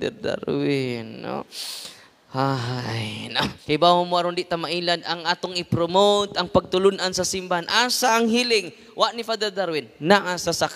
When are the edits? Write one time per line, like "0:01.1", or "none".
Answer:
0:03.6